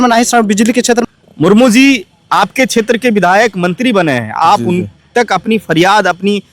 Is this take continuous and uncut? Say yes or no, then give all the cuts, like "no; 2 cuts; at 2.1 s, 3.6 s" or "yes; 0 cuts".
no; 1 cut; at 1.0 s